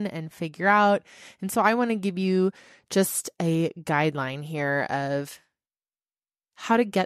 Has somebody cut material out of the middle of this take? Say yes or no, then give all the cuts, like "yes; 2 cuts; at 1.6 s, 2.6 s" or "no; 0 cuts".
no; 0 cuts